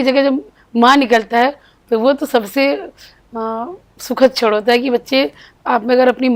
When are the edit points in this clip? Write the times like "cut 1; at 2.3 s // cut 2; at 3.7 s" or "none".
none